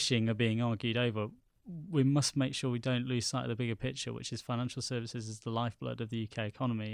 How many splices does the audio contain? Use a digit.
0